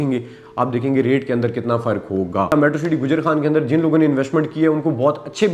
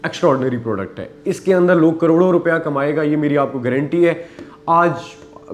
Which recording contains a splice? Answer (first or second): first